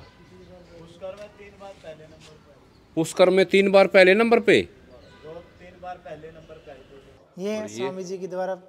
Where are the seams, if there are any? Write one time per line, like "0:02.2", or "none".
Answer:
0:07.2

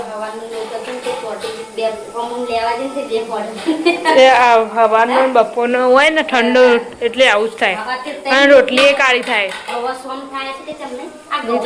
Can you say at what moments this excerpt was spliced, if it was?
none

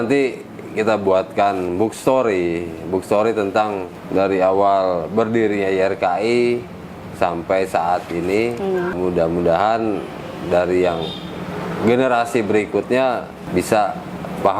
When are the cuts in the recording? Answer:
0:03.9
0:09.0
0:13.4

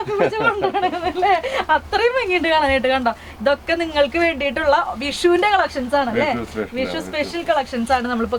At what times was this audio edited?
none

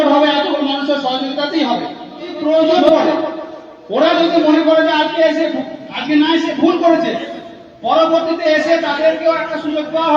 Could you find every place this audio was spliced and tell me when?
0:02.3

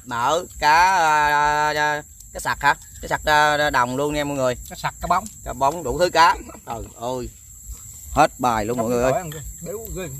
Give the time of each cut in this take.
none

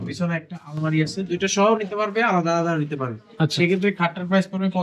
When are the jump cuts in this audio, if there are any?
none

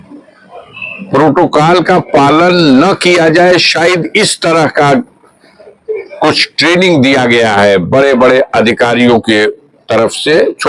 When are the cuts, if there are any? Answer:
none

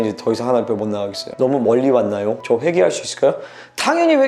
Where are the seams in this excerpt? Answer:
0:01.2
0:02.4

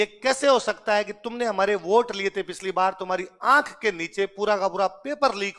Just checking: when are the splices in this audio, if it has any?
none

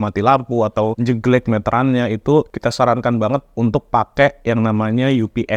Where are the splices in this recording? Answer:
0:01.0
0:02.5

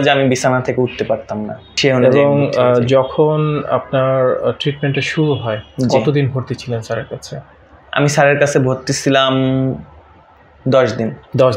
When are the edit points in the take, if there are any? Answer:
0:01.7

